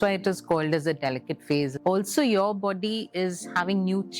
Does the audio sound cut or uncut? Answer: cut